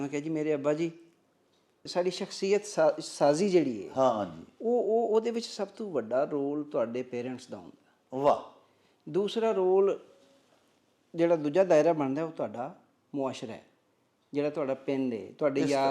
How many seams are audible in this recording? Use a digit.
1